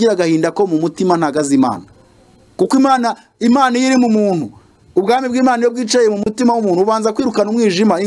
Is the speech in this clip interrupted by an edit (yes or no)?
no